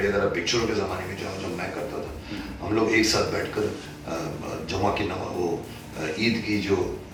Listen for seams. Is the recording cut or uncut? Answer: uncut